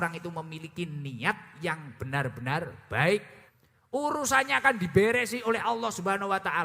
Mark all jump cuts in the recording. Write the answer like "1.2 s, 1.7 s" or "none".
3.4 s